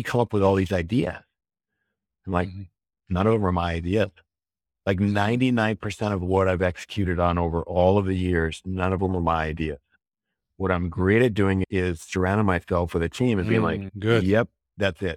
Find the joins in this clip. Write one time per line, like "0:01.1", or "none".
none

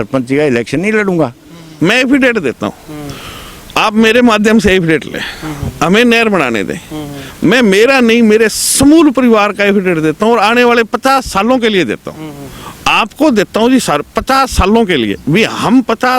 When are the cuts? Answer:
0:01.6

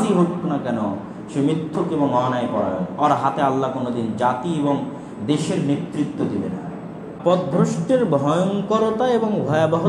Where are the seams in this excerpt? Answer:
0:07.2

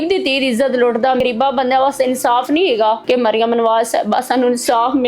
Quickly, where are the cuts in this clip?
0:01.2
0:03.0

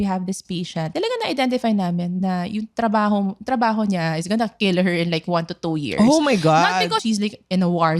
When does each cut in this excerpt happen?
0:00.9

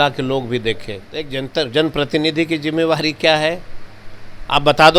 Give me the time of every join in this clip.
0:01.4

